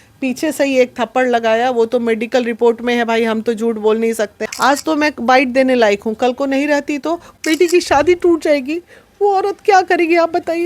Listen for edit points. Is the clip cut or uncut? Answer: cut